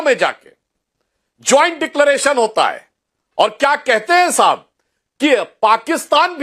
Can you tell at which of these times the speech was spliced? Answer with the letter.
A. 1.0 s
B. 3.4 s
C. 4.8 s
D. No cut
D